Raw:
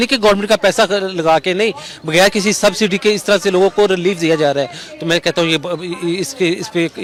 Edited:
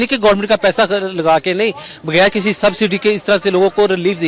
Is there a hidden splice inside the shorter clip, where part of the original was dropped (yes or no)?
no